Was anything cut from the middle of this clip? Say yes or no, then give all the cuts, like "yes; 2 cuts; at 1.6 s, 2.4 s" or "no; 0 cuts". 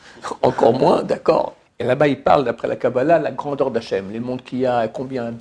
yes; 1 cut; at 1.6 s